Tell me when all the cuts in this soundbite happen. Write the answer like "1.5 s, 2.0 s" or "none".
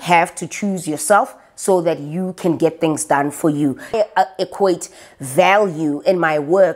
3.9 s